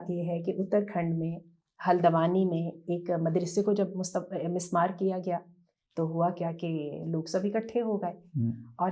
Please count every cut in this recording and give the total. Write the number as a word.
zero